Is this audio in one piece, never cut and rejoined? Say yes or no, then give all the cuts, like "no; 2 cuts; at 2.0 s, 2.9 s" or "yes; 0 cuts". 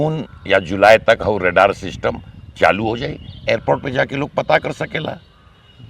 yes; 0 cuts